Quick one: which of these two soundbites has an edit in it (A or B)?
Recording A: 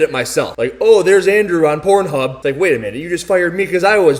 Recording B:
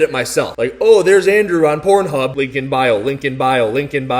B